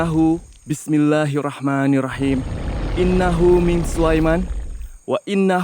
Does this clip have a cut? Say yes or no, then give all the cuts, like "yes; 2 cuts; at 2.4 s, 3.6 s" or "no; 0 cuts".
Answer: no; 0 cuts